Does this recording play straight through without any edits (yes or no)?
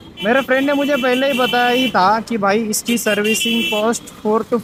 yes